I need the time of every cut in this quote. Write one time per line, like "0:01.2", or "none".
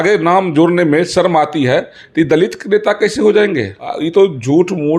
0:03.9